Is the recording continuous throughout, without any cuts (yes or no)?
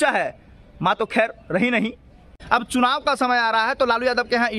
no